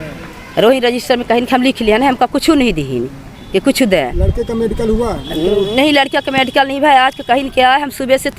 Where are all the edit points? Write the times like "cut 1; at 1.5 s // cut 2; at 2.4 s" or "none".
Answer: none